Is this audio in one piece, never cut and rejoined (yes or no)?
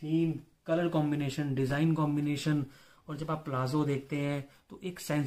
yes